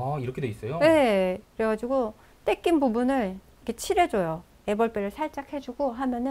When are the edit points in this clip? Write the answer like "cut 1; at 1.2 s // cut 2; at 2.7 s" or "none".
none